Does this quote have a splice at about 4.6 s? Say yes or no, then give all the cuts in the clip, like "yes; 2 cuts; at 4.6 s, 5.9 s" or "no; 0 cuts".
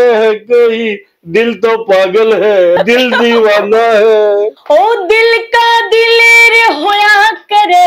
yes; 2 cuts; at 2.8 s, 4.6 s